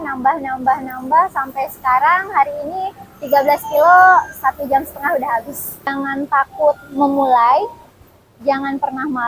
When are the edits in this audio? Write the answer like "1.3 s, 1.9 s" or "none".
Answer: 5.9 s

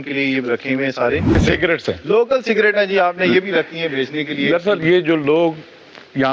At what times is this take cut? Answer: 1.4 s

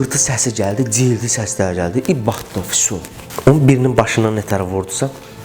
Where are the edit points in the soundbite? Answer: 3.2 s

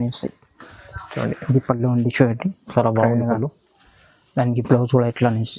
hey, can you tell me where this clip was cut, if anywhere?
none

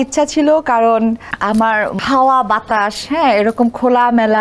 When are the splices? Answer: 1.5 s

